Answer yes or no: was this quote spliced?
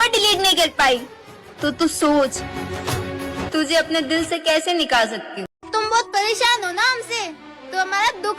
yes